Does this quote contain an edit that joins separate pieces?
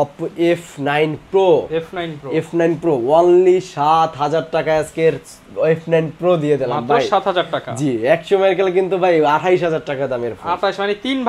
no; 0 cuts

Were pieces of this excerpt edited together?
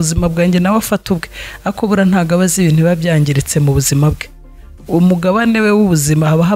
no; 0 cuts

